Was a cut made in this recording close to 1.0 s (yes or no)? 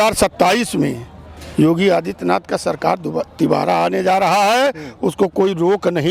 no